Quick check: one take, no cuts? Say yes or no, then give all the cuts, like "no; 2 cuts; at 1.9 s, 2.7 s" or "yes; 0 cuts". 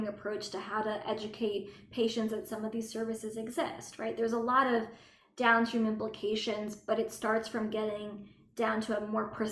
yes; 0 cuts